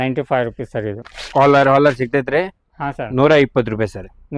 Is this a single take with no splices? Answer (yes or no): no